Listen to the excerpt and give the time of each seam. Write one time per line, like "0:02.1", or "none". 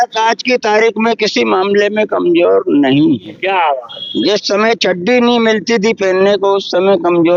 none